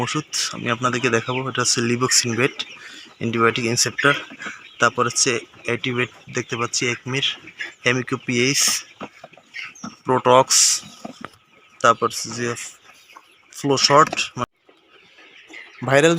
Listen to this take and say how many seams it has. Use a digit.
1